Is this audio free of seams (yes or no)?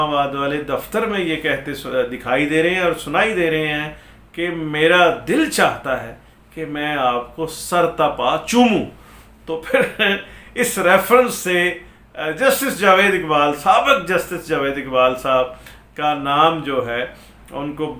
yes